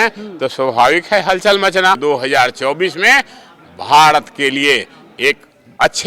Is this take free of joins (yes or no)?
no